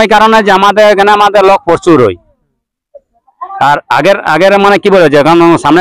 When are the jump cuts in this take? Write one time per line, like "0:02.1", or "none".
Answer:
none